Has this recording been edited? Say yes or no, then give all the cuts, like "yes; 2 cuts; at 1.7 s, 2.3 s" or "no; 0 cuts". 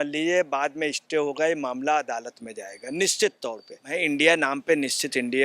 yes; 1 cut; at 3.9 s